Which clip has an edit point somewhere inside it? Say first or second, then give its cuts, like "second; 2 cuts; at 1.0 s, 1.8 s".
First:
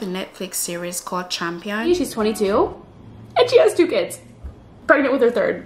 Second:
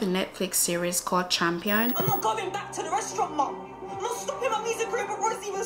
first; 1 cut; at 1.9 s